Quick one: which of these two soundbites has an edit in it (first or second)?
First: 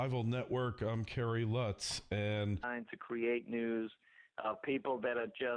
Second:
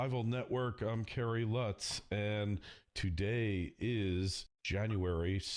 second